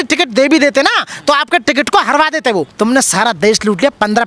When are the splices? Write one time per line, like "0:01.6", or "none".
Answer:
0:02.7